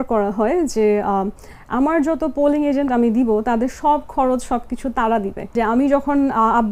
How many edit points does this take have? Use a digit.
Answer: 1